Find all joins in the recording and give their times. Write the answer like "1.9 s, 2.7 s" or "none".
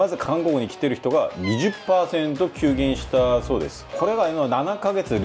none